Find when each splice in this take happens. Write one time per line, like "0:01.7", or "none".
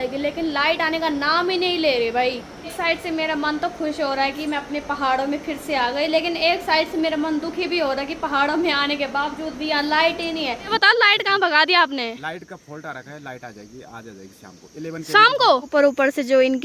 0:02.6
0:10.7
0:15.7

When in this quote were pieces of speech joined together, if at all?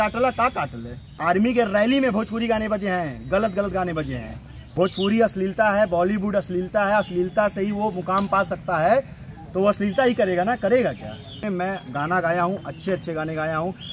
0:01.1
0:04.6
0:11.5

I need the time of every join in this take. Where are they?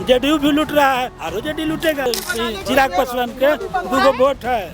0:02.1

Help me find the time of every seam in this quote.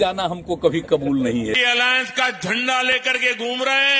0:01.6

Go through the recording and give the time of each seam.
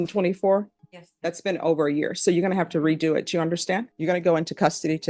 0:03.9

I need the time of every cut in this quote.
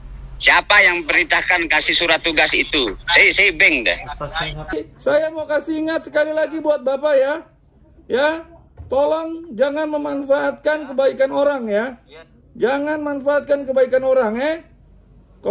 0:04.7

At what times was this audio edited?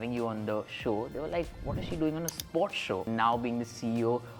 0:03.0

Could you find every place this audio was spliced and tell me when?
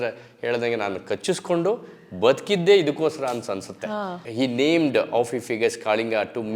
0:04.2

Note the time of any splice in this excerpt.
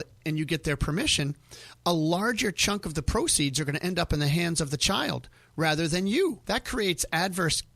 0:06.4

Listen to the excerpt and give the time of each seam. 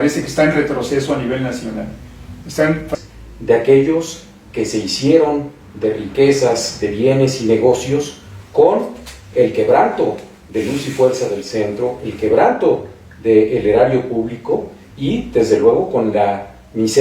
0:02.9

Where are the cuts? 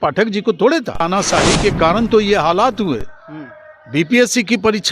0:01.0

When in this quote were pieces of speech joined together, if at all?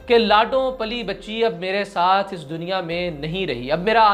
none

